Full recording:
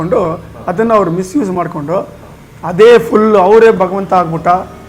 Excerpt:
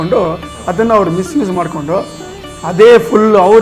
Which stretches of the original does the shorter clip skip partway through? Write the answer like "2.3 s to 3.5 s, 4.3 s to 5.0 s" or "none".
none

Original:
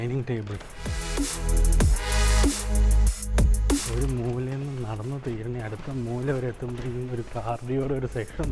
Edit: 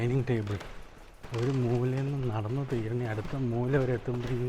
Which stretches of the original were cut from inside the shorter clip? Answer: 1.2 s to 3.8 s

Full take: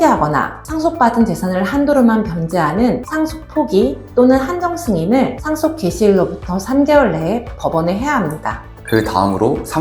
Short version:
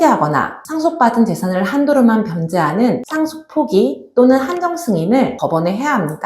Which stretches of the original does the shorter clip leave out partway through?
5.3 s to 7.6 s

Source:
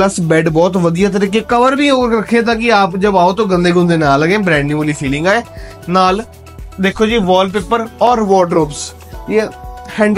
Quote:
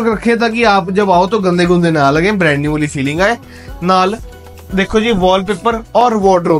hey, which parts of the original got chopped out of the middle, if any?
none

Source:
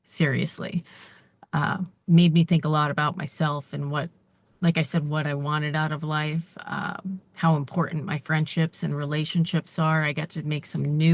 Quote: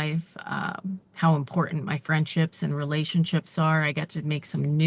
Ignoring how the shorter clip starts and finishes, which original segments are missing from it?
none

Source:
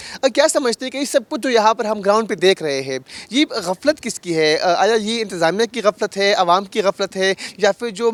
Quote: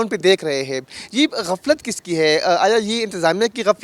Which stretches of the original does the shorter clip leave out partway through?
none

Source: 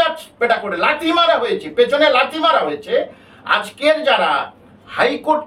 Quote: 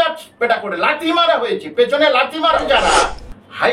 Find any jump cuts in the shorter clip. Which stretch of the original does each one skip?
2.6 s to 4.0 s

